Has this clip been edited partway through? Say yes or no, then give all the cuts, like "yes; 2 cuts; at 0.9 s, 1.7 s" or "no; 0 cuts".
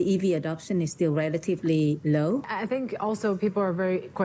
yes; 1 cut; at 2.5 s